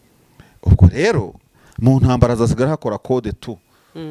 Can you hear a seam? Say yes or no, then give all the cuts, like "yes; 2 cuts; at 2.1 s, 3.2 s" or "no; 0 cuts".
no; 0 cuts